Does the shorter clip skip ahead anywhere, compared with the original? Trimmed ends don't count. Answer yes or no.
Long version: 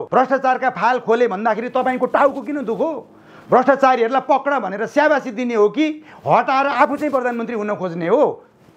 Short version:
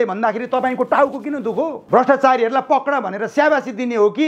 yes